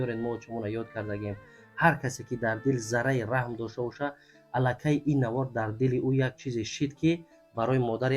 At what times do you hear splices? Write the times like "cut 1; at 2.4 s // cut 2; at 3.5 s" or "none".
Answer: none